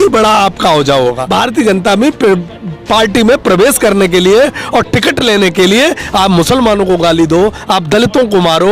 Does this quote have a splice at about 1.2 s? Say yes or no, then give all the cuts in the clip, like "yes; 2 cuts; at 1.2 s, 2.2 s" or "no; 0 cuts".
yes; 1 cut; at 1.2 s